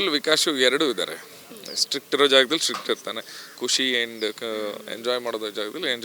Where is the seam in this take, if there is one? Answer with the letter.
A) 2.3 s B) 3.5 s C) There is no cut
C